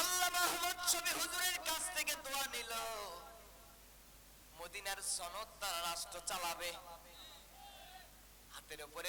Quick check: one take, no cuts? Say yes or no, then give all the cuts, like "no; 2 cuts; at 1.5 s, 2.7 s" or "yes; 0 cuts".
yes; 0 cuts